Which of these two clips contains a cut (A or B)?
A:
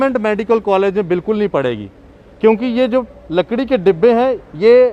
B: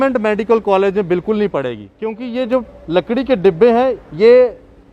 B